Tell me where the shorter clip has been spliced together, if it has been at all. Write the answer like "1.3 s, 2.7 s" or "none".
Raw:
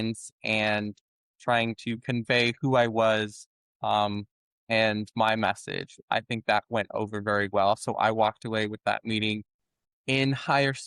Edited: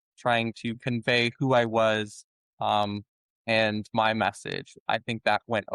none